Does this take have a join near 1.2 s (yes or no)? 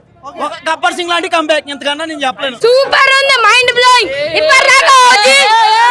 no